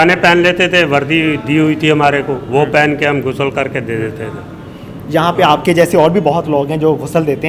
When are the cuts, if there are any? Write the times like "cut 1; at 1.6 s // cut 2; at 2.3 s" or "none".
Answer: none